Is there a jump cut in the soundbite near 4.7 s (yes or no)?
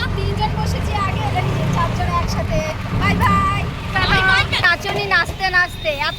yes